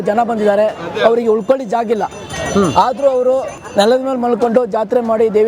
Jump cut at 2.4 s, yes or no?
no